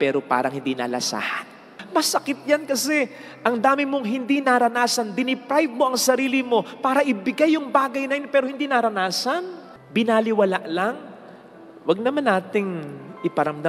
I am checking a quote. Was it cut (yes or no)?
no